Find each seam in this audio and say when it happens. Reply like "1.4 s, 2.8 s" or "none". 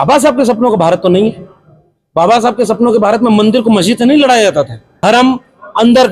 4.8 s